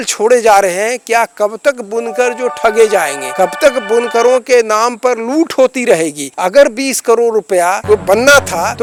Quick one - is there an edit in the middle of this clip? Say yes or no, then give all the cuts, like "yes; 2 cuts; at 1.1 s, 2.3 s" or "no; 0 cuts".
no; 0 cuts